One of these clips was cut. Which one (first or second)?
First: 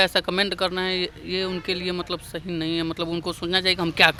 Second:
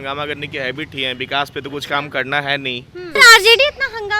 second